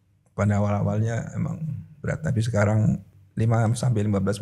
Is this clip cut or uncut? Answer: cut